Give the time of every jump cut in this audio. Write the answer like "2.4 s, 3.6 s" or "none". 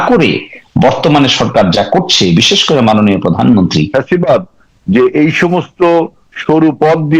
3.9 s